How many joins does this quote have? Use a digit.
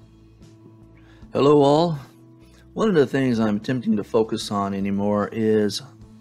1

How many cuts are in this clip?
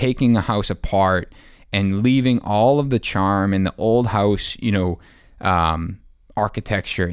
0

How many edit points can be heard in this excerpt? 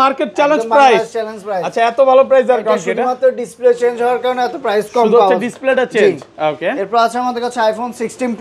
0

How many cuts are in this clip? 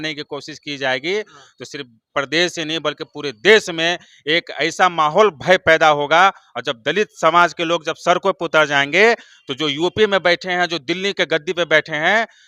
0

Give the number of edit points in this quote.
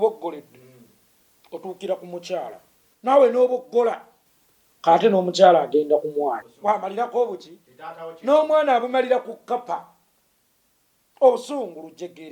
1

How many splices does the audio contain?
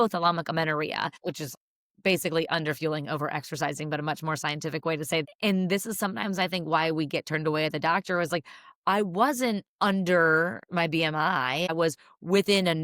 3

